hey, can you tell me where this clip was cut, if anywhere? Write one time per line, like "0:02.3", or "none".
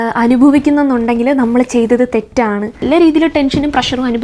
0:02.8